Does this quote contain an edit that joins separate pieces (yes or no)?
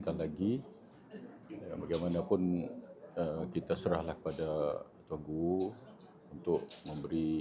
no